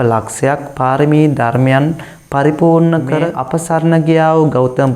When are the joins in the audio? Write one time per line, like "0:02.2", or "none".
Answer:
0:03.4